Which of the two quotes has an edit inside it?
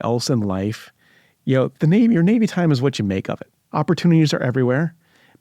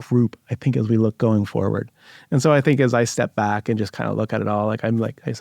first; 1 cut; at 3.6 s

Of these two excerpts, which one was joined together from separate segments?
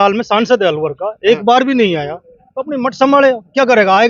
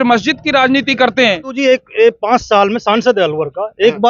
second; 1 cut; at 1.5 s

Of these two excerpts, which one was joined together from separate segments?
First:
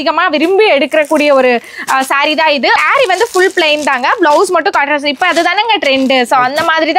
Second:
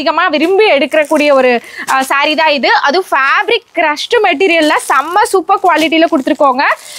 first; 1 cut; at 2.8 s

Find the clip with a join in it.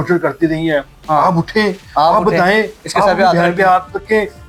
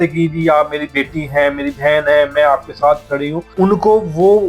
second; 1 cut; at 3.5 s

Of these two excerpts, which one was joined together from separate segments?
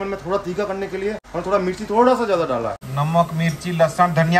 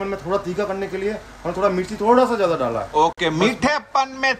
first; 2 cuts; at 1.2 s, 2.8 s

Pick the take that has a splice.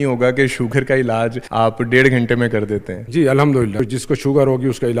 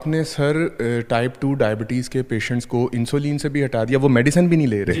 first; 3 cuts; at 1.4 s, 3.0 s, 3.8 s

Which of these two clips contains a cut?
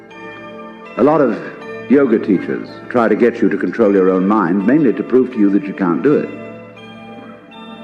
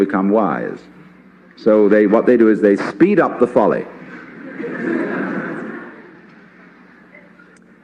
second; 1 cut; at 2.9 s

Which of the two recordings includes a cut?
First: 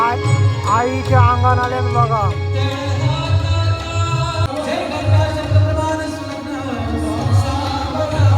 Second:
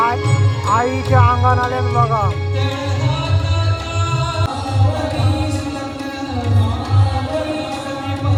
first; 1 cut; at 4.5 s

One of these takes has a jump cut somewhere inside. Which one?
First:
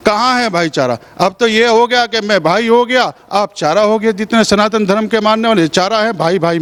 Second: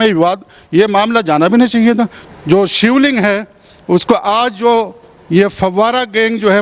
second; 1 cut; at 2.2 s

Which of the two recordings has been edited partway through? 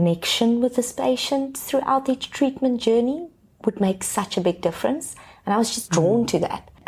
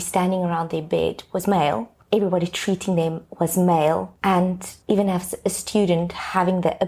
second; 1 cut; at 4.4 s

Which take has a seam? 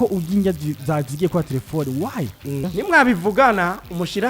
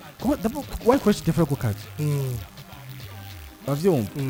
first; 1 cut; at 2.7 s

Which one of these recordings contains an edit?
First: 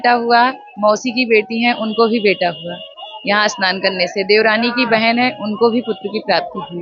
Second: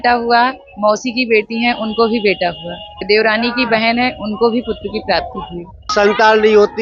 second; 2 cuts; at 3.0 s, 5.9 s

